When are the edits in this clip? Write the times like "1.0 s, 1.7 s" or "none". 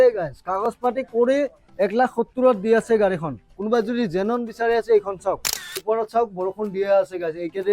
5.8 s